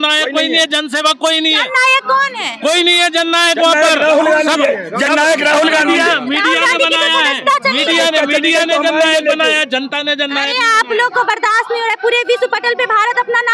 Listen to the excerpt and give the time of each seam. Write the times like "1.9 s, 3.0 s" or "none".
none